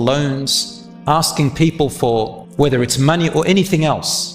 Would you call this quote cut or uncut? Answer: cut